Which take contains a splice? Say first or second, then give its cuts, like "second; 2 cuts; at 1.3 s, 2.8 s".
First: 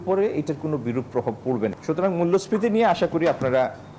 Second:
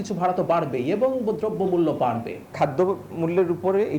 second; 1 cut; at 2.5 s